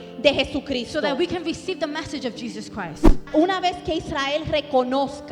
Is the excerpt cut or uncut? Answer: cut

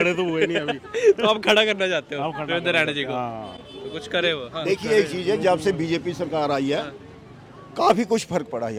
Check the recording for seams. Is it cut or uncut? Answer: uncut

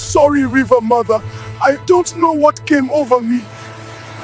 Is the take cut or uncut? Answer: uncut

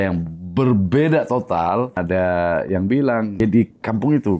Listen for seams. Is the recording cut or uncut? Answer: cut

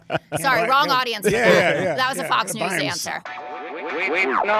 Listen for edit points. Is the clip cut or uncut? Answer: cut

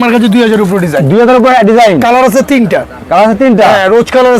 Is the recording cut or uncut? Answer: uncut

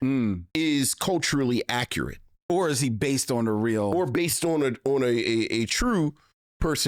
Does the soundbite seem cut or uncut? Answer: uncut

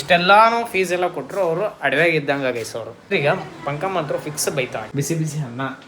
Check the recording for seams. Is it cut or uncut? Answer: cut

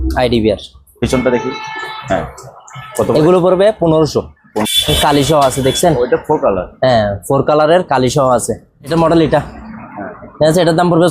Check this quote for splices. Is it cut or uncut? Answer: cut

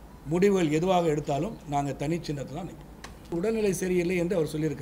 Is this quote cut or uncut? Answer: cut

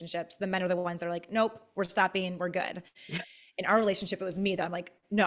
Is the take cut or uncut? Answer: uncut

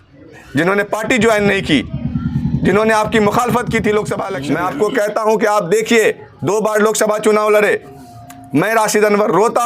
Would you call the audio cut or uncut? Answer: cut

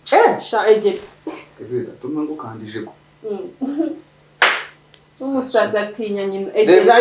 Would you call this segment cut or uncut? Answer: uncut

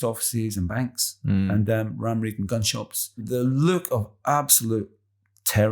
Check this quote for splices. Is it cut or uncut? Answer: cut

